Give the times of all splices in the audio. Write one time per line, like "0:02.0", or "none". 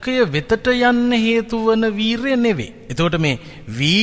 0:02.8